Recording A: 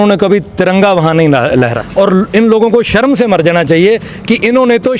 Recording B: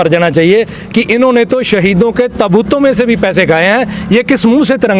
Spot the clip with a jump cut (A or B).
A